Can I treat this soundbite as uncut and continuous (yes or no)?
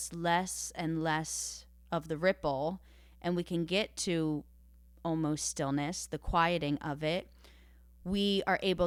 yes